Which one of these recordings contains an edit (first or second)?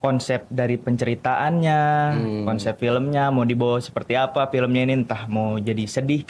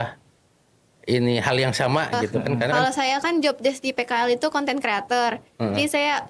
second